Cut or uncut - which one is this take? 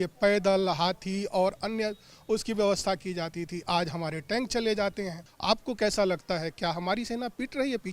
cut